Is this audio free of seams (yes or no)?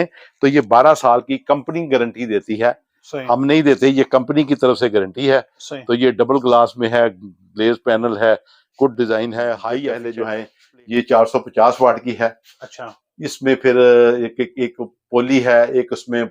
no